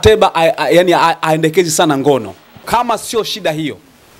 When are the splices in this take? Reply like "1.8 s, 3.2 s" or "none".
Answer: 2.6 s